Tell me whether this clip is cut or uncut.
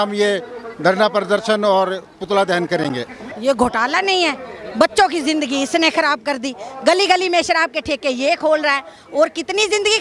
cut